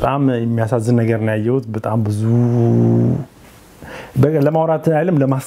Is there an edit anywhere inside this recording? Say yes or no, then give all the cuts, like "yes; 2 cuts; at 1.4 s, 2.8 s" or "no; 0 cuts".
no; 0 cuts